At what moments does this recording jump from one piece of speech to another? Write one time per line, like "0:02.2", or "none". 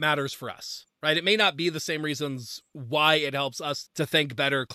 none